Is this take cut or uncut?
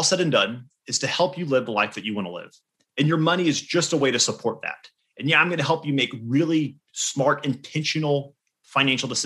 uncut